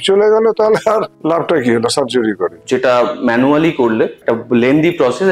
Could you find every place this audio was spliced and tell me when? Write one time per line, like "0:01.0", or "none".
0:02.7